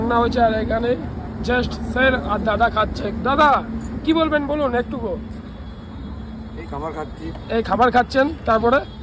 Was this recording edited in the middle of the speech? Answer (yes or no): no